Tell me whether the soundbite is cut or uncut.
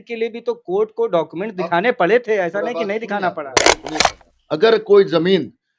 cut